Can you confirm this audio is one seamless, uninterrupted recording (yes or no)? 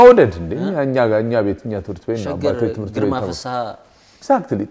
yes